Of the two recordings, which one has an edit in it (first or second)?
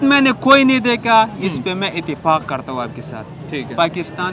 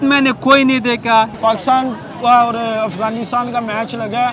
second